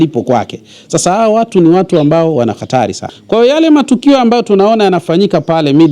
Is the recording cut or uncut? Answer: cut